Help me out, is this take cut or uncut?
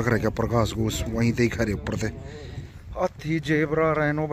uncut